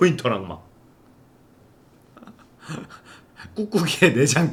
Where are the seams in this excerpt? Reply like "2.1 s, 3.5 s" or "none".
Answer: none